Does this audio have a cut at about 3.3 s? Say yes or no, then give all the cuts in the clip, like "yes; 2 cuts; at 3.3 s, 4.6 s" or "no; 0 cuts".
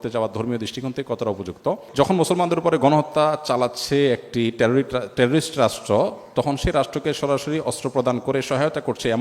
no; 1 cut; at 1.8 s